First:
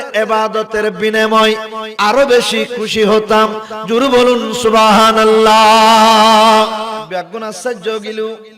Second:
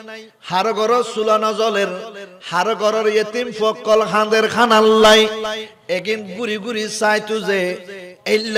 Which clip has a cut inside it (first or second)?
first